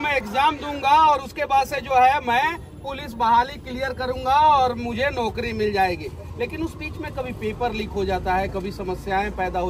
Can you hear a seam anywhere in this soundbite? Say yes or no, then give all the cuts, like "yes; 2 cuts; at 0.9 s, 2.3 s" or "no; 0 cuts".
no; 0 cuts